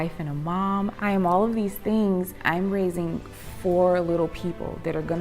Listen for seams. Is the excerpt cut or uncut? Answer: cut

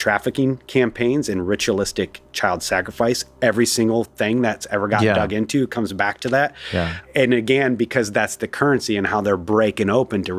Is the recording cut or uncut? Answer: uncut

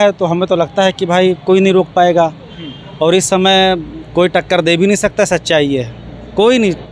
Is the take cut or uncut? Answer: uncut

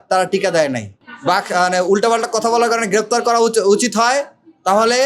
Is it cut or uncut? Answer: cut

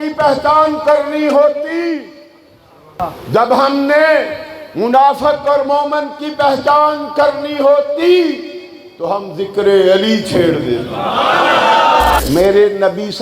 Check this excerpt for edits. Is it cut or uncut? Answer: cut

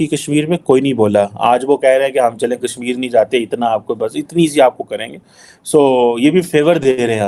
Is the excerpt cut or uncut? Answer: uncut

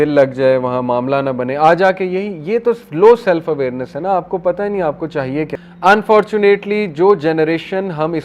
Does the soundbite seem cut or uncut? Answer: cut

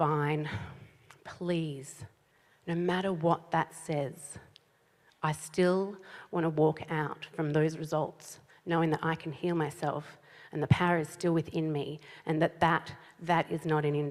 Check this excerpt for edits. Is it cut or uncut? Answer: uncut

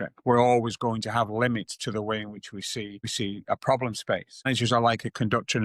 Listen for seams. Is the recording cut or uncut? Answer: cut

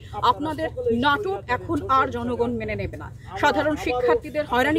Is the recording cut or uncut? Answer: uncut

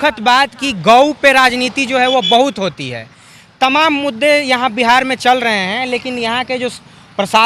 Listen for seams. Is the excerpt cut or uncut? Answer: uncut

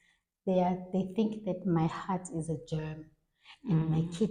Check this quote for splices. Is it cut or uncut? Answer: uncut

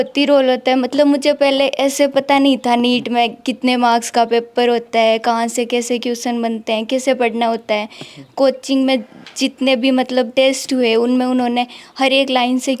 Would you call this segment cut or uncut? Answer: uncut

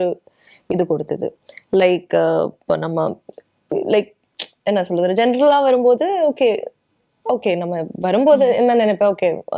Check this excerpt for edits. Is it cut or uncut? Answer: uncut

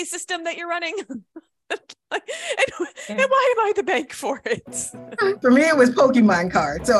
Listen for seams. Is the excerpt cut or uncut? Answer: cut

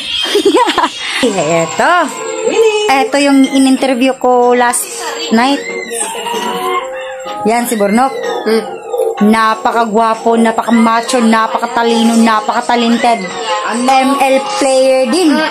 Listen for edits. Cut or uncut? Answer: cut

